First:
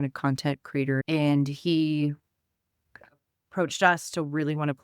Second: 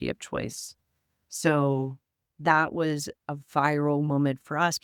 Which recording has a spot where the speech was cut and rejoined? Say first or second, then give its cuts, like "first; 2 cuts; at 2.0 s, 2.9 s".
first; 1 cut; at 1.0 s